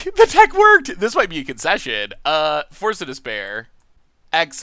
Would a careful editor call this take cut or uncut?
uncut